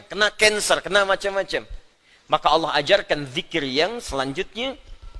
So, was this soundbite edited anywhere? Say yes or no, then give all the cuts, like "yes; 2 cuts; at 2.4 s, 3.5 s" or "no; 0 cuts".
no; 0 cuts